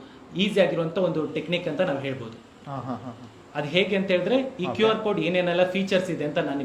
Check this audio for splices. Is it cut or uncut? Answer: uncut